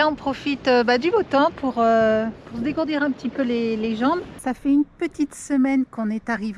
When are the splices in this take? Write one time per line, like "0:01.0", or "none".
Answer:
0:04.3